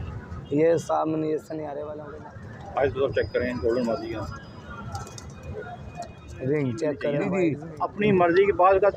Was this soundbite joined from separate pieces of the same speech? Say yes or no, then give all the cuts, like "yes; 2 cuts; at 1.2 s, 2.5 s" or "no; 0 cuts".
yes; 2 cuts; at 1.9 s, 7.2 s